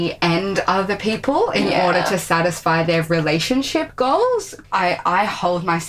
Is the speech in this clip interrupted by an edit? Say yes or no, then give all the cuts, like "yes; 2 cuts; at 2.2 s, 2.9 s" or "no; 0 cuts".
yes; 1 cut; at 4.0 s